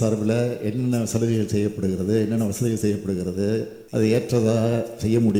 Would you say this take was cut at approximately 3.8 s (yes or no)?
yes